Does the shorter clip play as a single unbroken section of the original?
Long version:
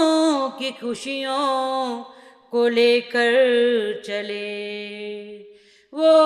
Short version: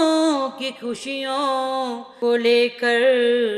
no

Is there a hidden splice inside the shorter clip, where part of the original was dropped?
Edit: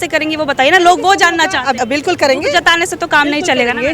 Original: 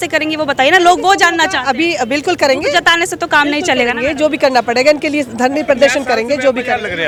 yes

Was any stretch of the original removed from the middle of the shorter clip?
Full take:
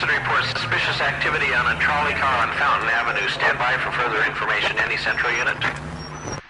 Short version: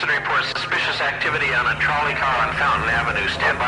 no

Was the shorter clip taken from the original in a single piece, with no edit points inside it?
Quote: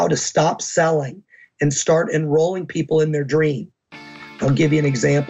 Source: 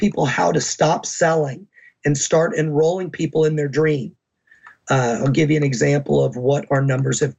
no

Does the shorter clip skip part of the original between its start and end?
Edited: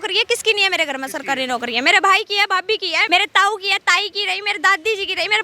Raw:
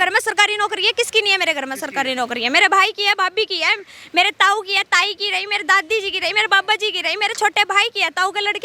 yes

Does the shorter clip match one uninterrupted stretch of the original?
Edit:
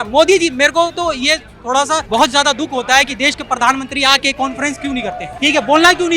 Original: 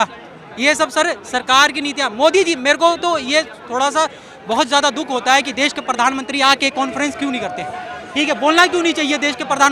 no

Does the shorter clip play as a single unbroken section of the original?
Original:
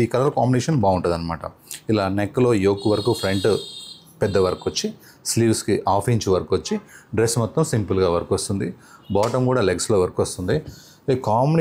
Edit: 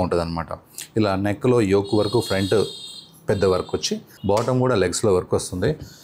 no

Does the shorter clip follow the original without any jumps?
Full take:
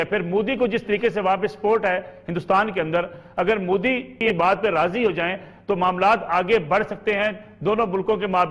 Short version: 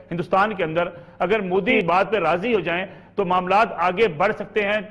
no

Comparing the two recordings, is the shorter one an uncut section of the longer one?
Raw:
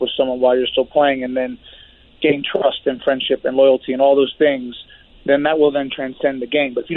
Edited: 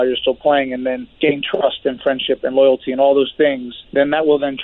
no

